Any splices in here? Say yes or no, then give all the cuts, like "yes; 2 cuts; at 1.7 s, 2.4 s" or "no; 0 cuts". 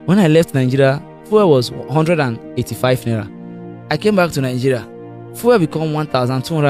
yes; 1 cut; at 1.2 s